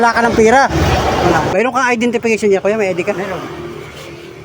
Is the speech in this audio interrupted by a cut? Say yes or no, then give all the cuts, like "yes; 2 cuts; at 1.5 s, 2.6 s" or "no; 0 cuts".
yes; 1 cut; at 1.5 s